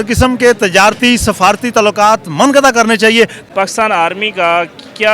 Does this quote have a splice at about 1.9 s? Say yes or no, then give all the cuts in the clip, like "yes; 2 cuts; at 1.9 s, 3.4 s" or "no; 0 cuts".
no; 1 cut; at 3.4 s